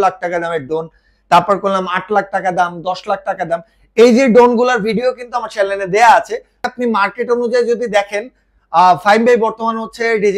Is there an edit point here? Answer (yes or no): yes